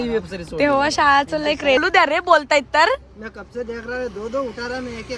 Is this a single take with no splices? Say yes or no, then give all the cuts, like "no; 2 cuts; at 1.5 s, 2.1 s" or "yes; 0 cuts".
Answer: no; 1 cut; at 1.8 s